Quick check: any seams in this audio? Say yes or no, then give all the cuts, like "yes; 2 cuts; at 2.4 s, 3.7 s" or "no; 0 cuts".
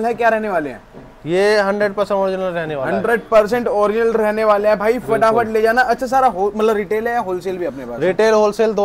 no; 0 cuts